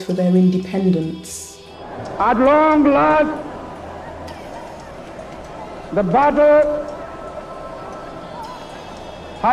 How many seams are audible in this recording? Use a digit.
1